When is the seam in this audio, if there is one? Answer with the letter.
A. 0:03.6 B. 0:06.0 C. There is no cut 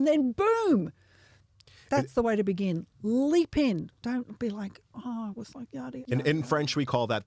B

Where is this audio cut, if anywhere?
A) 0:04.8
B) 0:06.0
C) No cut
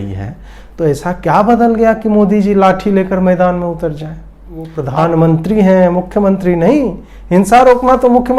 A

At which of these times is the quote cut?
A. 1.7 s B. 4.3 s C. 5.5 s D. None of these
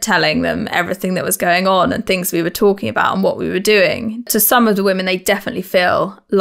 B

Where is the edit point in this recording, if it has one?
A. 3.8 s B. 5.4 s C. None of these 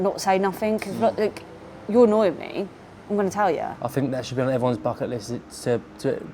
A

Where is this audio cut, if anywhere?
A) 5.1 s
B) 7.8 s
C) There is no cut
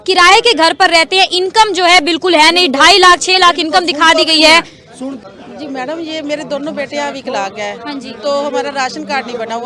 A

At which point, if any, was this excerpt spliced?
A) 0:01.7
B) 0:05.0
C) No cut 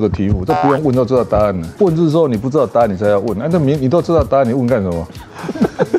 A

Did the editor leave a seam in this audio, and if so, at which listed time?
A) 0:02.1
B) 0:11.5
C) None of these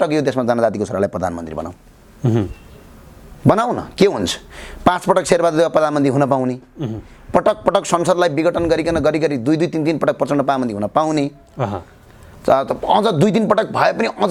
C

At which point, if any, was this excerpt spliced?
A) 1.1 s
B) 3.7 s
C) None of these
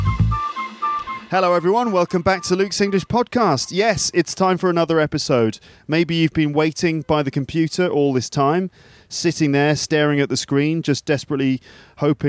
A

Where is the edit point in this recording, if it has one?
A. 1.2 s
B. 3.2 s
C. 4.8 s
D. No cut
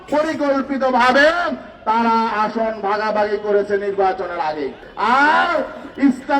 C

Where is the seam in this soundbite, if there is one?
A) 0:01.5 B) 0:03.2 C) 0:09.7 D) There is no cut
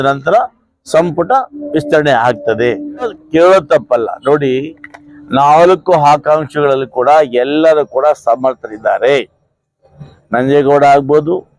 B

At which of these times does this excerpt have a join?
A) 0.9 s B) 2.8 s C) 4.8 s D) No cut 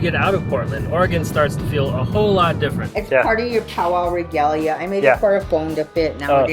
B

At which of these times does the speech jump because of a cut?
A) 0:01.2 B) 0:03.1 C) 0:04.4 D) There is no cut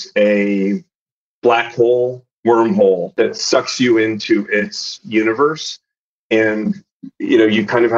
B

